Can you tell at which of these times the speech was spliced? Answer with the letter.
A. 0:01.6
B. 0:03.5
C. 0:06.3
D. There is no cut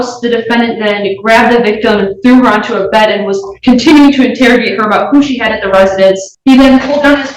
C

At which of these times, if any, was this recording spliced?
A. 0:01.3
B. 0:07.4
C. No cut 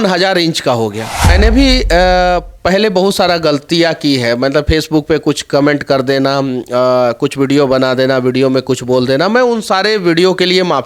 A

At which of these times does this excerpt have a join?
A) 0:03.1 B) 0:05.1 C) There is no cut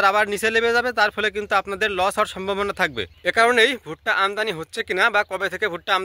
A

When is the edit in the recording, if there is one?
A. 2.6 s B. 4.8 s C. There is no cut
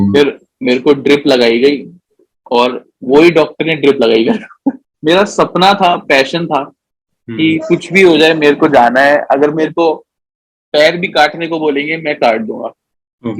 B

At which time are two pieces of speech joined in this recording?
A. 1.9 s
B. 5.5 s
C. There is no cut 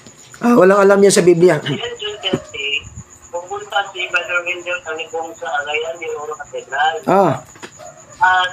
A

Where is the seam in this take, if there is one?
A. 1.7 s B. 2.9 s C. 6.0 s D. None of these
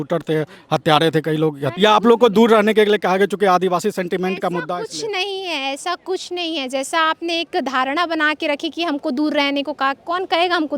A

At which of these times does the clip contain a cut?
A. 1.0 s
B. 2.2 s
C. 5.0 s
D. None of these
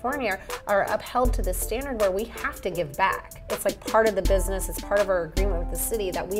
D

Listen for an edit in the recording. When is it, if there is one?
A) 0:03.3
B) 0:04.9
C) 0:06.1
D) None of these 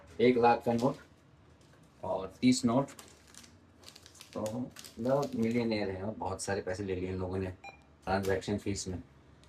D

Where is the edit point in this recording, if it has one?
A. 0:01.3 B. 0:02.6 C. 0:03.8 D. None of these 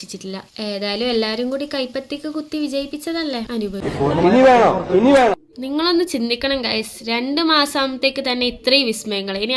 C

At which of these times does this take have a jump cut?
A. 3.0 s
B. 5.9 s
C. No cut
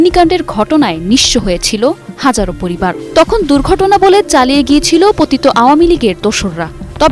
A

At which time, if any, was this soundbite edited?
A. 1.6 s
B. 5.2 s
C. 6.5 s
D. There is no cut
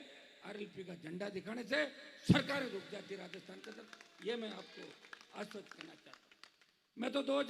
D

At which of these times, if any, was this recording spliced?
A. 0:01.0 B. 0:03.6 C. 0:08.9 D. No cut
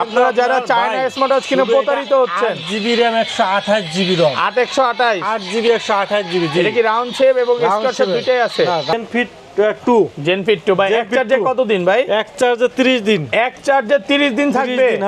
C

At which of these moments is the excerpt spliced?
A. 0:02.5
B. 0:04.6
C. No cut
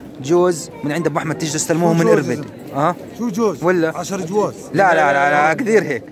C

